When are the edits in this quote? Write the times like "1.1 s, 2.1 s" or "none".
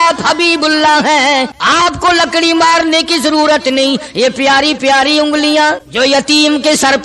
1.6 s, 5.9 s